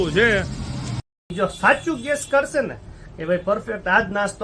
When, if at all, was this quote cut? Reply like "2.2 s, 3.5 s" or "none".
1.3 s